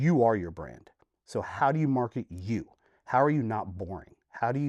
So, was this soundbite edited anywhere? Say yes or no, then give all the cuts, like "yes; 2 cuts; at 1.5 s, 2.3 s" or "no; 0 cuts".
no; 0 cuts